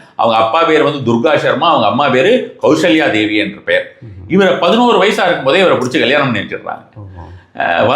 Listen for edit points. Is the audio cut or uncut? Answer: uncut